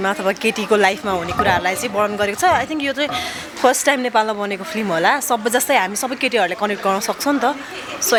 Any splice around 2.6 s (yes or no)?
no